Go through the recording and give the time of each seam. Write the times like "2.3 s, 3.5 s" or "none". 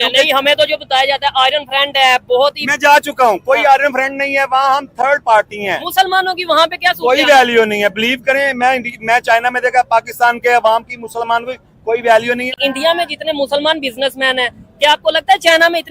12.5 s